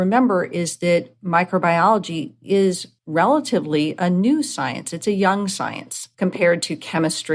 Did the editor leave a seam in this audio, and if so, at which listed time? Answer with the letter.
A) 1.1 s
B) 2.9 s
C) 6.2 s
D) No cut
B